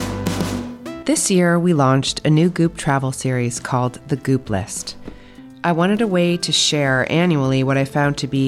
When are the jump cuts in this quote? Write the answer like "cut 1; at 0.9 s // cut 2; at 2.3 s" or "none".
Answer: cut 1; at 1.0 s